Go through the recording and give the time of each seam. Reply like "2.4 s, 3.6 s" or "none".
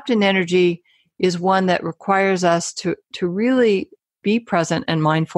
4.1 s